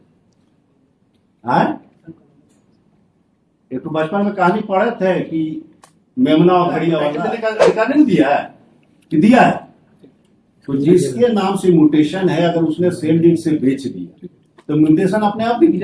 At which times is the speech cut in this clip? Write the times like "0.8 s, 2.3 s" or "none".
7.2 s